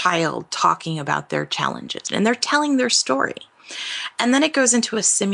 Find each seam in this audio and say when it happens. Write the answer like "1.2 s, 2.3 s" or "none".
2.0 s